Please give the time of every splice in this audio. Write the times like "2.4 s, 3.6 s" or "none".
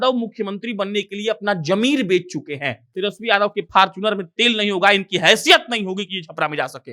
2.9 s